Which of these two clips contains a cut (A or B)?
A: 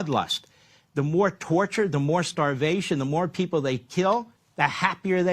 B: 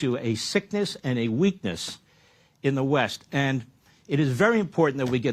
A